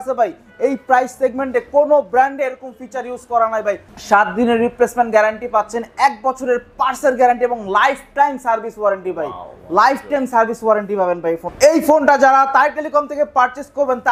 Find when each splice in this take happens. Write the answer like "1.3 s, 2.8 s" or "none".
3.9 s, 11.5 s